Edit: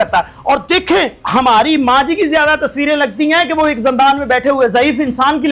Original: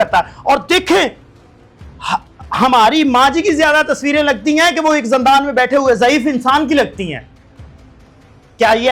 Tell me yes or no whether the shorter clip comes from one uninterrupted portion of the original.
no